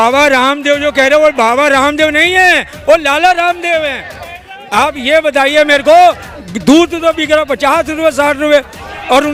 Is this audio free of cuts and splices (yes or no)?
yes